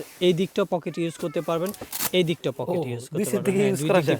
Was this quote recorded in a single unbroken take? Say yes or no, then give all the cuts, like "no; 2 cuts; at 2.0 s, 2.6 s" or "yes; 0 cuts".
yes; 0 cuts